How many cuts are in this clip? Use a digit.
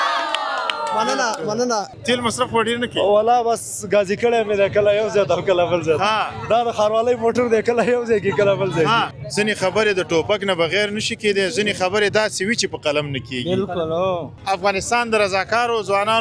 3